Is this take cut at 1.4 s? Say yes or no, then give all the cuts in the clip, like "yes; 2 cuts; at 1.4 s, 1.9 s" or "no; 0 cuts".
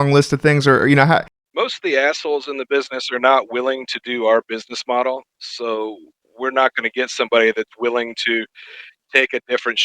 yes; 1 cut; at 1.4 s